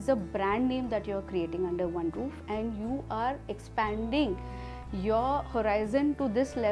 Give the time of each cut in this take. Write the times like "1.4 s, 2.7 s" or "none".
none